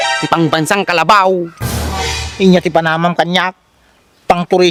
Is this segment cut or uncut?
uncut